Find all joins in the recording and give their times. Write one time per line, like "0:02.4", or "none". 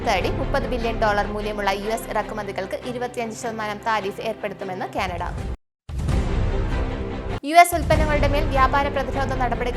none